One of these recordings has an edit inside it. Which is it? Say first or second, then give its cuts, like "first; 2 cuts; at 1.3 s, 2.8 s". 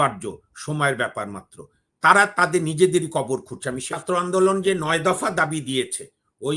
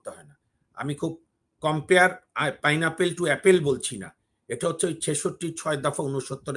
first; 1 cut; at 3.9 s